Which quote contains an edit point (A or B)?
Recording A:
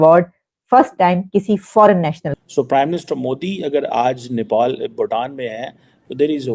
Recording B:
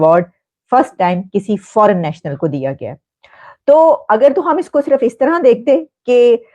A